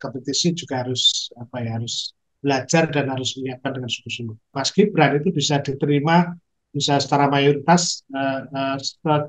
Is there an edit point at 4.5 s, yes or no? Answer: yes